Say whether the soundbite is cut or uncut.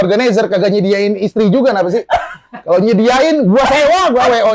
uncut